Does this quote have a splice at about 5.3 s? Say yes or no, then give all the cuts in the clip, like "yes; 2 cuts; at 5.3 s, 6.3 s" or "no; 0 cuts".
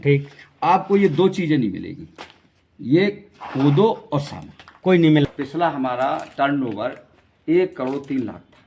yes; 1 cut; at 5.3 s